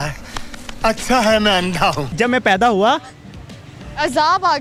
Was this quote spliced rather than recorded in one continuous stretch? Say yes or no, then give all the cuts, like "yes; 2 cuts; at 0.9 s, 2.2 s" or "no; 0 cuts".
no; 0 cuts